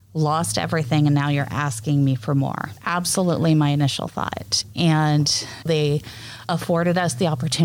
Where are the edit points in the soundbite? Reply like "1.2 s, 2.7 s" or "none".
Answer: 2.7 s, 5.6 s